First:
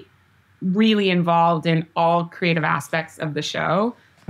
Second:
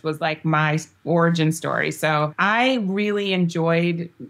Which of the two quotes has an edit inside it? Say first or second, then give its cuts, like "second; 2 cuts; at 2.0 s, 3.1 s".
second; 1 cut; at 2.4 s